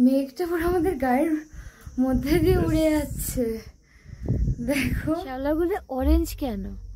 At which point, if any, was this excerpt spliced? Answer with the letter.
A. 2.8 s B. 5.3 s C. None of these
B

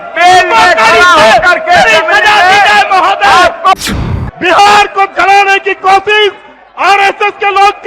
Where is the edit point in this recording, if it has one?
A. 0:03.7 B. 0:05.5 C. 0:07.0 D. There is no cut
A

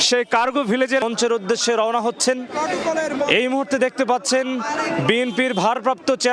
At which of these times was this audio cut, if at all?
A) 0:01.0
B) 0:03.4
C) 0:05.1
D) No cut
A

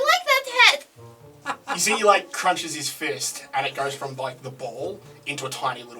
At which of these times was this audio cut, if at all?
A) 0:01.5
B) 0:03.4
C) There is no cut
A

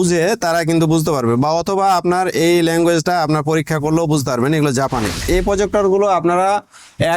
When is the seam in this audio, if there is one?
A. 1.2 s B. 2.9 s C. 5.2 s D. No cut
C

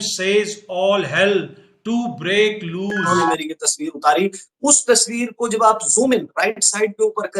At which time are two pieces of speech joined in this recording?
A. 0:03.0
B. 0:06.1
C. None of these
A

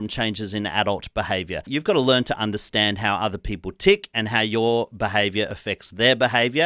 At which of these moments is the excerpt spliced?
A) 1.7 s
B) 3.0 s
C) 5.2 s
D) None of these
A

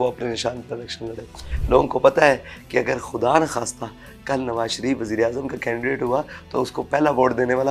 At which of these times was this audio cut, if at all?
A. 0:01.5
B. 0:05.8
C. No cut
A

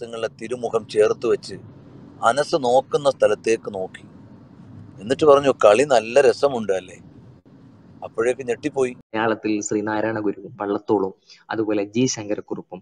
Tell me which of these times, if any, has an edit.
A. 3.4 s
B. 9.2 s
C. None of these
B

